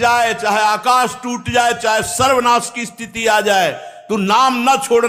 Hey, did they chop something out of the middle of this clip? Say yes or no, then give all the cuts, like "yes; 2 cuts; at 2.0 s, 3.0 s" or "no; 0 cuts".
no; 0 cuts